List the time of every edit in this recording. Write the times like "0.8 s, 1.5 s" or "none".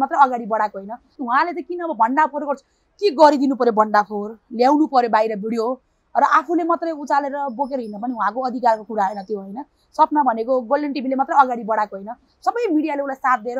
1.1 s